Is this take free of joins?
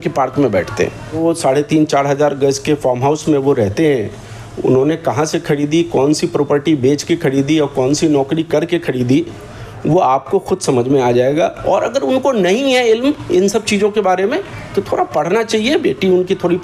no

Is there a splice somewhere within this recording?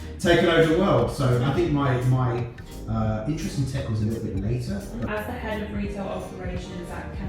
yes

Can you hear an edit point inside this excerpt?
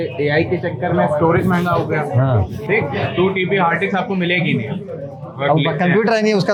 no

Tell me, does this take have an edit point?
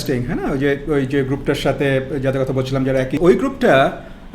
yes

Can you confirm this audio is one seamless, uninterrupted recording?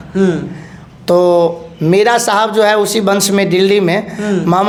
yes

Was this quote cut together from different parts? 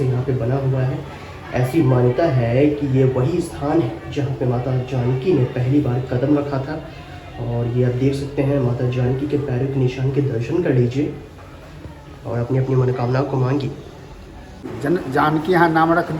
yes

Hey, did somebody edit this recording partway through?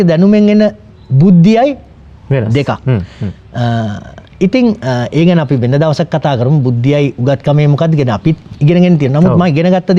no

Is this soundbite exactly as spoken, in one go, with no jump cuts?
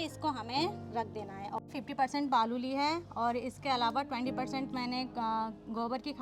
no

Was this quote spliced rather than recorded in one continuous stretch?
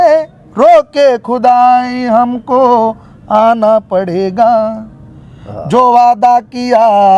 no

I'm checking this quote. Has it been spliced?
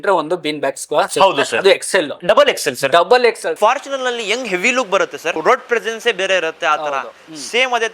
yes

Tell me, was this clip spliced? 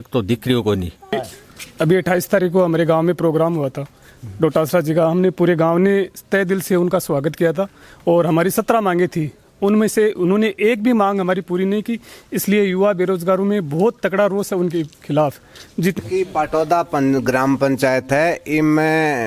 yes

